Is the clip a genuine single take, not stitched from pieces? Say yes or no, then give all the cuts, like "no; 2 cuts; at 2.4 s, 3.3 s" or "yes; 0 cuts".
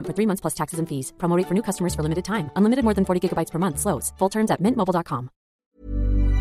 no; 1 cut; at 5.5 s